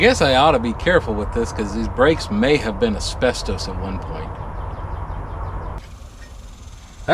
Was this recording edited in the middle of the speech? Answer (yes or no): yes